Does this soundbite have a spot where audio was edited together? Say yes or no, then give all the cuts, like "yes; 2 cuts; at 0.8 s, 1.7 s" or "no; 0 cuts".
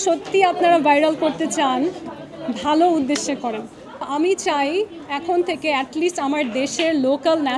yes; 1 cut; at 4.1 s